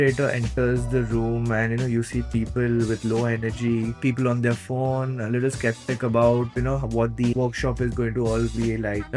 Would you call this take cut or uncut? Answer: uncut